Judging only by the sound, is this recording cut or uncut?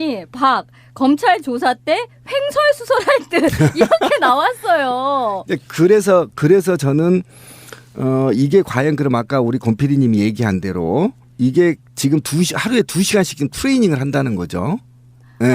cut